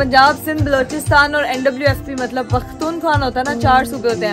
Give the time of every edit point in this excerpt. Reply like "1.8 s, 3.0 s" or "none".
none